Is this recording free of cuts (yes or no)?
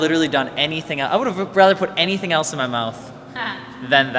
yes